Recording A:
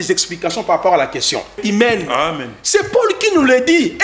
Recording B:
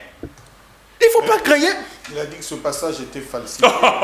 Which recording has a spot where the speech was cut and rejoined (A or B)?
A